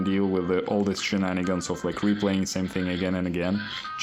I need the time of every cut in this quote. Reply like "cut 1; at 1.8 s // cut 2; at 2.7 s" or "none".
none